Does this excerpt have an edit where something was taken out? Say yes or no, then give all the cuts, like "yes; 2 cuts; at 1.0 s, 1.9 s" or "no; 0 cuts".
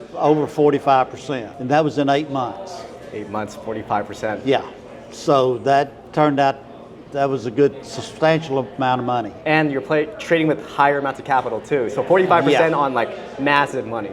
no; 0 cuts